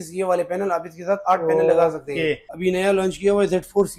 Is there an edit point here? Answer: yes; 1 cut; at 2.5 s

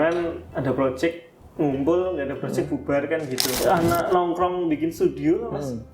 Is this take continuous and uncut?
no; 1 cut; at 3.4 s

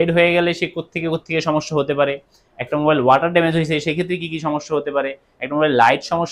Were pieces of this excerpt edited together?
no; 0 cuts

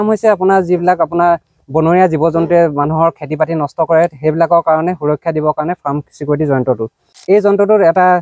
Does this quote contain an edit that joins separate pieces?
yes; 1 cut; at 7.1 s

